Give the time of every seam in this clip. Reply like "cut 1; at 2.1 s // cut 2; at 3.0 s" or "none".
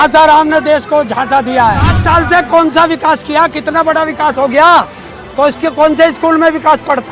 cut 1; at 2.0 s